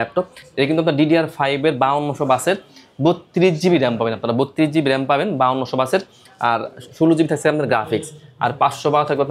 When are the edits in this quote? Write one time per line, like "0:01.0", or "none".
none